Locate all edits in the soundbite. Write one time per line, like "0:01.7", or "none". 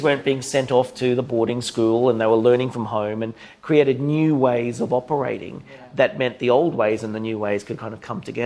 none